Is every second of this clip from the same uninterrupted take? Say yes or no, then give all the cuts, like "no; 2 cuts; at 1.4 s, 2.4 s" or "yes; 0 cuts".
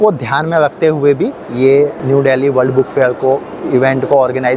no; 1 cut; at 2.0 s